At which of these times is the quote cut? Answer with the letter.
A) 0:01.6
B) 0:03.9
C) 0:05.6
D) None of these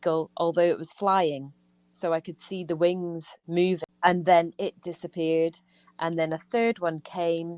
B